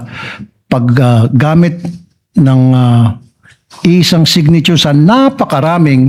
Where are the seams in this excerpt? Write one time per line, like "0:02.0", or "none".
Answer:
none